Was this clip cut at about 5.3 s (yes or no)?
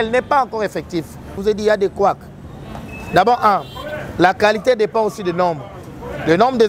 no